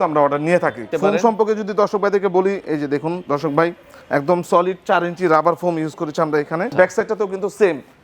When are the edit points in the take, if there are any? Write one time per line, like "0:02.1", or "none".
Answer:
0:00.9
0:06.7